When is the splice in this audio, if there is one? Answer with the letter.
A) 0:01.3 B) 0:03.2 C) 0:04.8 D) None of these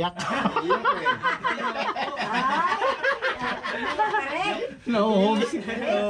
D